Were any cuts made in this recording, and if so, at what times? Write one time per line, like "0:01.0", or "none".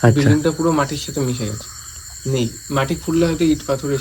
none